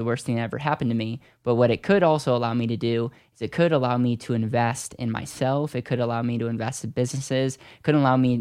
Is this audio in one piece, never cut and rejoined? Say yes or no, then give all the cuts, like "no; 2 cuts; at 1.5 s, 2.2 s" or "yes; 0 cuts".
yes; 0 cuts